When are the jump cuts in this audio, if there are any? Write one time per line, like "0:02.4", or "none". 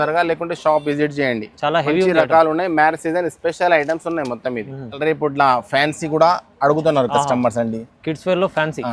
0:05.0